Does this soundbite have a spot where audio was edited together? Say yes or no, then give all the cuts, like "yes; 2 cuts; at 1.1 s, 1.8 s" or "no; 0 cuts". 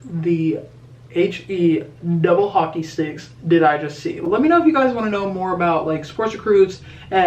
yes; 1 cut; at 4.2 s